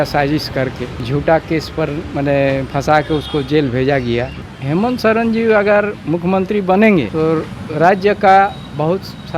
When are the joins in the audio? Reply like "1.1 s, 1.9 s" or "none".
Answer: 0.9 s, 4.5 s, 7.1 s